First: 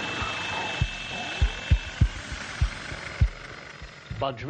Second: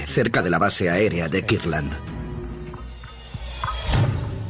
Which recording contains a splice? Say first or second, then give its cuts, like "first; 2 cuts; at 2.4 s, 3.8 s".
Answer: second; 1 cut; at 1.3 s